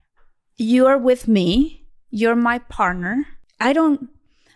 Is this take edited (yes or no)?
yes